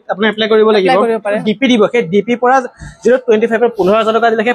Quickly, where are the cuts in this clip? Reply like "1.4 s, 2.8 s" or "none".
1.4 s

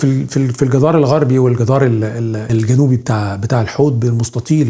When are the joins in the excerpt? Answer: 2.4 s

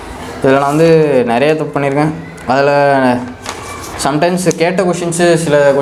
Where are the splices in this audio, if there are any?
none

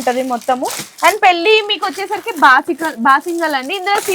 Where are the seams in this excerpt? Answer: none

